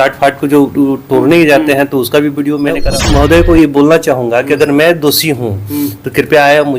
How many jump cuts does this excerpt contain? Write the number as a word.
one